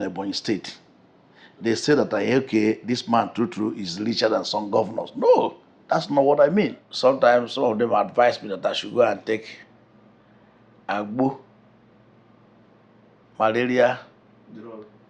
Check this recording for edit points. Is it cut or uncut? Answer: cut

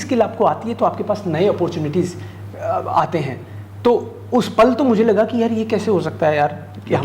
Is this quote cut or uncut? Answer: uncut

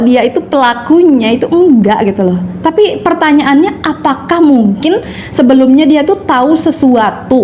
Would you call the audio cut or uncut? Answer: uncut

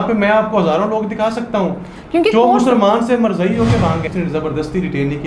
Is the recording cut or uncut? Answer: cut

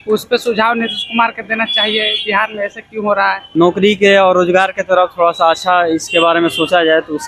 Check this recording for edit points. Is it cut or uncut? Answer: cut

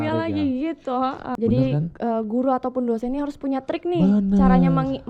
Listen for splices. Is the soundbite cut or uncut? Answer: cut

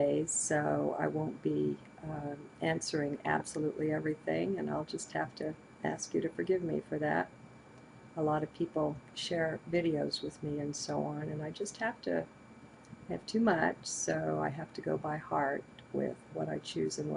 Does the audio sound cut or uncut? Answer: cut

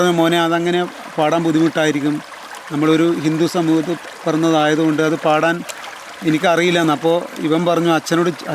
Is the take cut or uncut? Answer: uncut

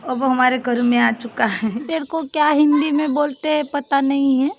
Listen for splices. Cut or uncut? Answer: cut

